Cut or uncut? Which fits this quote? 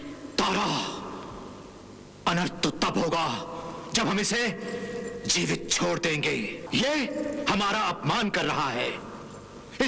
cut